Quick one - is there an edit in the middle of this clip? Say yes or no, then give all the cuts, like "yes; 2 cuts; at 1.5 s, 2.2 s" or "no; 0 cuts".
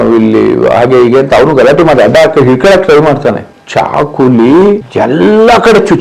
yes; 1 cut; at 4.9 s